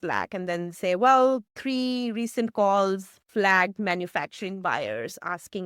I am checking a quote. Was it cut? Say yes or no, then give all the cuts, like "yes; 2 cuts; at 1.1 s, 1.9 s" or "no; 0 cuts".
no; 0 cuts